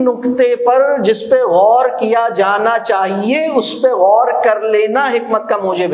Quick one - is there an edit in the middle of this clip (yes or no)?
no